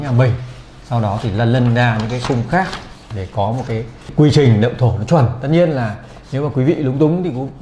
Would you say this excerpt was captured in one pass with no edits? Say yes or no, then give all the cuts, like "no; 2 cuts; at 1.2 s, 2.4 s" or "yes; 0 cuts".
no; 2 cuts; at 3.1 s, 4.1 s